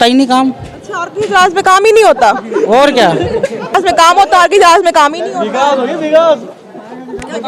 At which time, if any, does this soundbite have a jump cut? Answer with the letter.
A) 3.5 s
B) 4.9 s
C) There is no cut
C